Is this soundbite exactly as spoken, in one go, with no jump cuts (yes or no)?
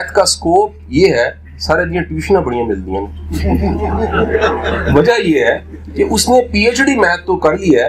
yes